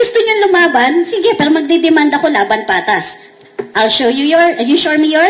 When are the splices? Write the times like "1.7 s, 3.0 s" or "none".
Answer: none